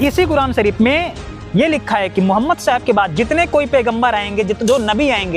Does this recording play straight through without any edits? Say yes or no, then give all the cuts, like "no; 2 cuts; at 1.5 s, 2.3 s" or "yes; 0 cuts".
yes; 0 cuts